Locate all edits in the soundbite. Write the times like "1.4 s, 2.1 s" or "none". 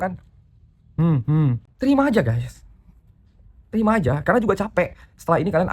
1.7 s

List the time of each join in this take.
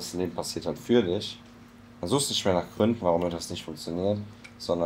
none

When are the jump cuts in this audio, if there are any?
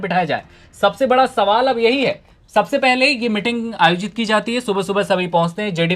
none

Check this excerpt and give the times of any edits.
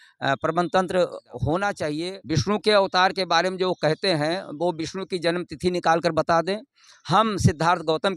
2.1 s

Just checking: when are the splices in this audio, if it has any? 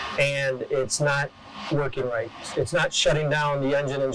2.4 s

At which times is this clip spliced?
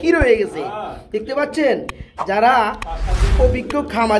none

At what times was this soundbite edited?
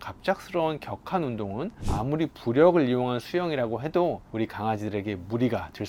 none

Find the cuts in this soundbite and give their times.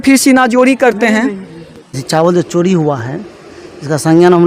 2.0 s

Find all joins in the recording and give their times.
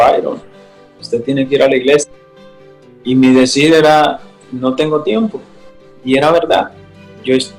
none

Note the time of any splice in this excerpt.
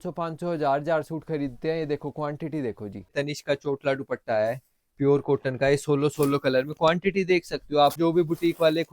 3.1 s, 8.0 s

